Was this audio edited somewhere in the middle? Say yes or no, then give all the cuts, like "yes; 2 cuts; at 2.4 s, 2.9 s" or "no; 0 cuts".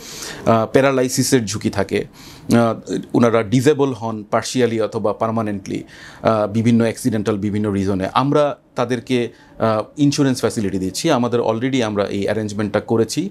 no; 0 cuts